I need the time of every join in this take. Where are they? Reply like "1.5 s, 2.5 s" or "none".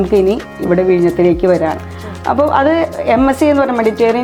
none